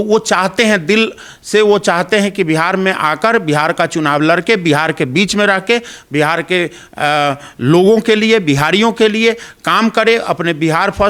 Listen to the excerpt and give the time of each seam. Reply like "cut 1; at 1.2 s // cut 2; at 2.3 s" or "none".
none